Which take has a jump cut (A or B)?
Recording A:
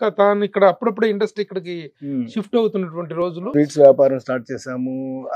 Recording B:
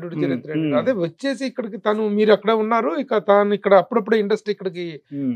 A